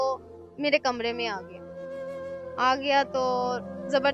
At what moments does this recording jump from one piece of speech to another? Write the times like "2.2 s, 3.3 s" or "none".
none